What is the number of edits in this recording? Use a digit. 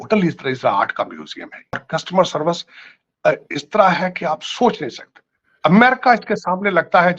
1